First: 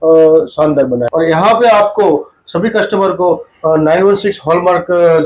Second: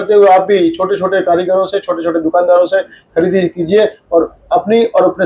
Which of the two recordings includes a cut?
first; 1 cut; at 1.1 s

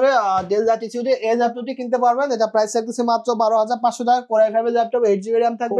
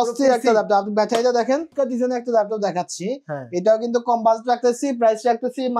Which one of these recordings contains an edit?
second; 1 cut; at 1.7 s

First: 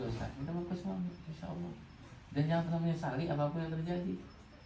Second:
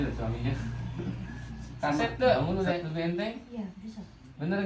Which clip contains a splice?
second; 1 cut; at 2.4 s

